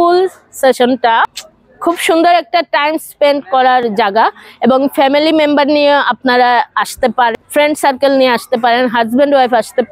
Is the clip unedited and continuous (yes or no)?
no